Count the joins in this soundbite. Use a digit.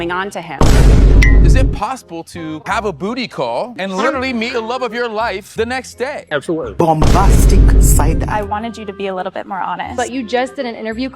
3